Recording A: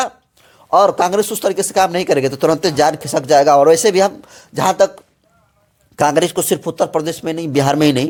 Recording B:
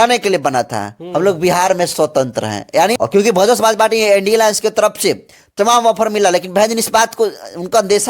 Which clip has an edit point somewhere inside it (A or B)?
B